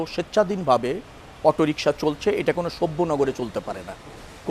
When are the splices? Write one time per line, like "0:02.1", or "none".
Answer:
none